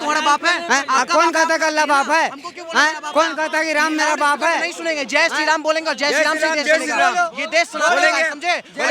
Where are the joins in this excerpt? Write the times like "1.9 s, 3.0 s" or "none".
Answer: none

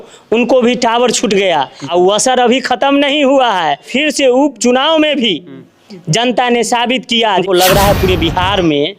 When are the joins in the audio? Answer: 1.8 s, 3.9 s, 7.4 s

